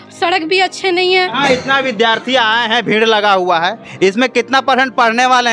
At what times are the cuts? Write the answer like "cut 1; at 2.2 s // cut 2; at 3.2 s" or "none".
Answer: cut 1; at 1.2 s